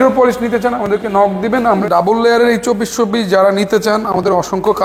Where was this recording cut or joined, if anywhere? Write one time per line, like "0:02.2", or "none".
0:01.8